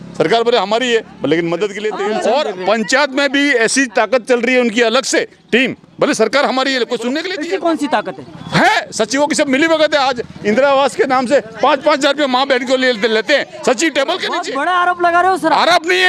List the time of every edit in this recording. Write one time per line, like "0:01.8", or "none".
0:01.8
0:07.3
0:14.5